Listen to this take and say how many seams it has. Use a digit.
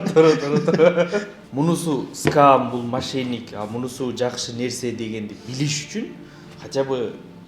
1